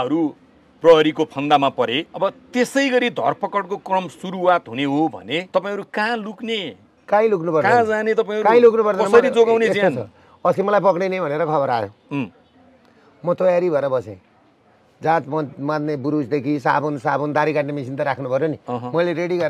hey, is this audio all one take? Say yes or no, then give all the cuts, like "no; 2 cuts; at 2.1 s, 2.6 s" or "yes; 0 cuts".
no; 2 cuts; at 2.1 s, 5.5 s